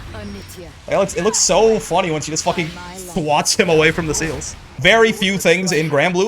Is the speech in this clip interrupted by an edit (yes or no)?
yes